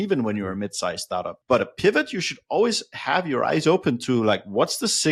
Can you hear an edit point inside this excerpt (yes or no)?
no